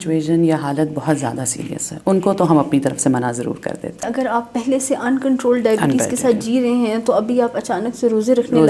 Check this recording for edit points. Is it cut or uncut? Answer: cut